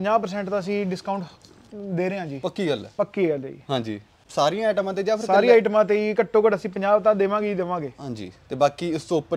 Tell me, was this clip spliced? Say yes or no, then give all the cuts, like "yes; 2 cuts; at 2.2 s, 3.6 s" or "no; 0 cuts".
no; 0 cuts